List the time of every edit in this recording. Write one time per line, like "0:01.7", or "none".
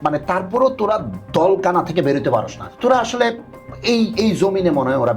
0:02.6